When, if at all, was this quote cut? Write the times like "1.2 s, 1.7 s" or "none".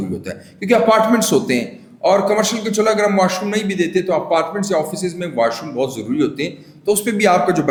none